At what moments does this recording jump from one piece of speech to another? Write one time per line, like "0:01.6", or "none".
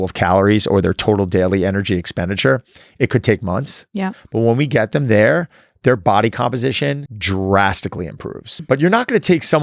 0:07.1
0:08.6